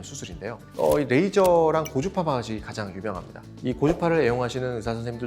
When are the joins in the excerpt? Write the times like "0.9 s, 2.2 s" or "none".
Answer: 3.4 s